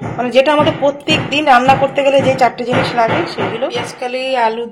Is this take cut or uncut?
cut